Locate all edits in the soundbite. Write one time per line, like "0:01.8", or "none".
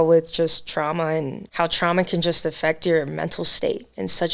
0:01.4